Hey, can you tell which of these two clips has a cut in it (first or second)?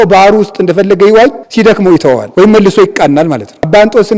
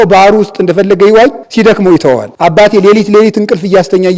second